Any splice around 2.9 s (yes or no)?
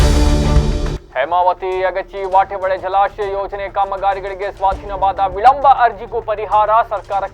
no